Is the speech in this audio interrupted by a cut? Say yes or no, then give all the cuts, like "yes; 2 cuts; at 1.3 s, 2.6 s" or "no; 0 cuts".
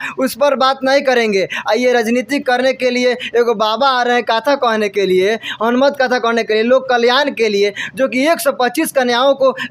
no; 0 cuts